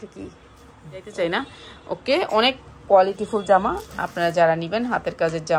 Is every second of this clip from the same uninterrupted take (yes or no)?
no